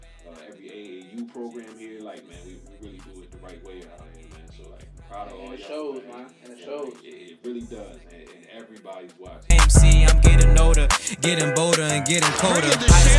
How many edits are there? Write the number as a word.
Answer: one